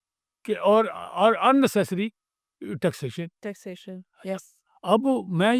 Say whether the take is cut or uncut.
uncut